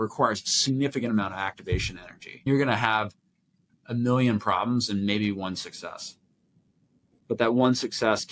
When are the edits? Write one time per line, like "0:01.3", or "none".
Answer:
0:02.4